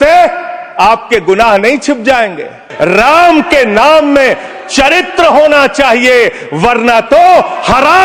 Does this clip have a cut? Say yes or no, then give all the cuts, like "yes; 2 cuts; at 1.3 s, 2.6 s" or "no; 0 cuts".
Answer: yes; 1 cut; at 2.7 s